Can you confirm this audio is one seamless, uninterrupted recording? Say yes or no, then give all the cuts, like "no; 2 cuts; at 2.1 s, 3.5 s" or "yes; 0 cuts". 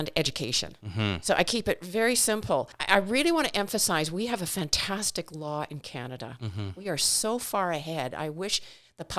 no; 1 cut; at 2.8 s